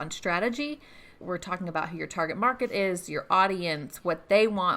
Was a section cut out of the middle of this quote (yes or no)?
yes